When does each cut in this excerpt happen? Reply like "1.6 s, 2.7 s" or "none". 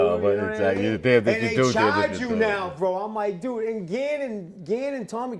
none

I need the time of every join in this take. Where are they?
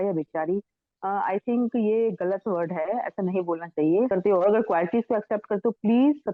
4.1 s

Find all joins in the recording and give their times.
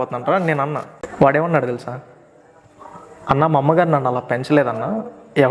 none

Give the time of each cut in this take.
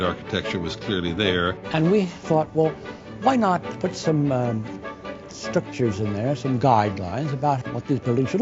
1.6 s, 3.7 s, 7.6 s

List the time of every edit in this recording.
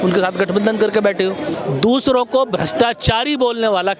1.5 s

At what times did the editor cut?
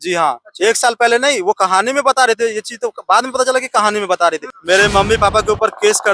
4.5 s

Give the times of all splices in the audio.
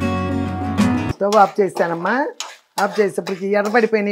1.1 s

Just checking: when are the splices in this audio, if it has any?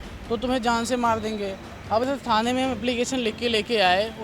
2.0 s

